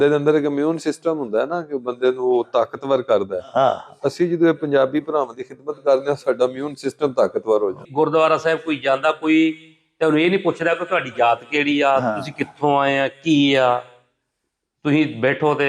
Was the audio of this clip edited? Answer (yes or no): yes